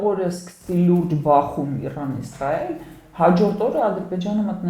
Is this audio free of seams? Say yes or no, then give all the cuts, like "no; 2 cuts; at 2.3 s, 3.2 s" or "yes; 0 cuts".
yes; 0 cuts